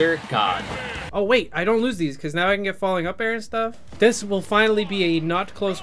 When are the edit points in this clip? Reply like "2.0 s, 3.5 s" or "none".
0.9 s, 3.8 s